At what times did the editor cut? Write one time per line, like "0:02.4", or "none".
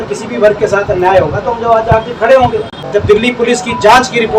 0:02.9